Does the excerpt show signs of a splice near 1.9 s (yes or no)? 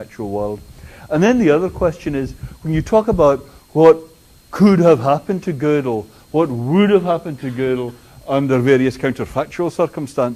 yes